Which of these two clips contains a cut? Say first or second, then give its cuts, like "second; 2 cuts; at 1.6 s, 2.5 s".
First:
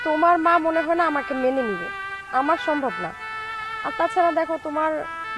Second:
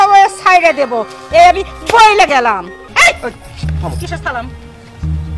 second; 1 cut; at 2.8 s